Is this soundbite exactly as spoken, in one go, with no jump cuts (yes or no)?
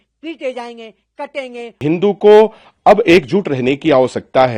no